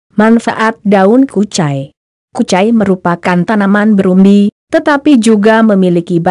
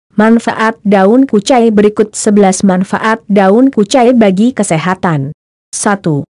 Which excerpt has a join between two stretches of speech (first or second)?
first